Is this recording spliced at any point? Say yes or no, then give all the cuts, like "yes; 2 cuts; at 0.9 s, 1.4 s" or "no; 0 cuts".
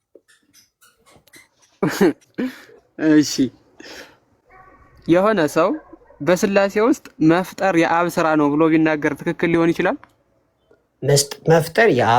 no; 0 cuts